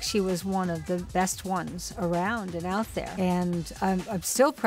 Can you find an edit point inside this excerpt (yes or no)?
yes